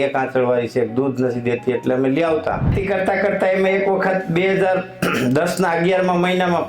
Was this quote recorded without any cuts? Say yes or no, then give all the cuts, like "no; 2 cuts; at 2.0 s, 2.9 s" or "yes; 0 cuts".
no; 1 cut; at 2.8 s